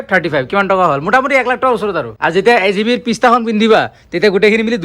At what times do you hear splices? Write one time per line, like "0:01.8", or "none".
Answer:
0:02.1